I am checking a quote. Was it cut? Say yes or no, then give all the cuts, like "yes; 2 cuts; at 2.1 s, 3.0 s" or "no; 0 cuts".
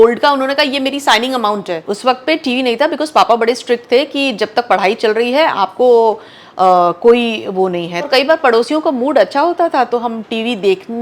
yes; 2 cuts; at 1.9 s, 8.1 s